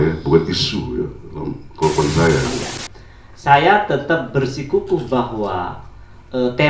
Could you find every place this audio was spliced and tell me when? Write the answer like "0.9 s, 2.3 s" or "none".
2.5 s